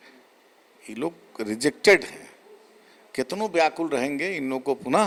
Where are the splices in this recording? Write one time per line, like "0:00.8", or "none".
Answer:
none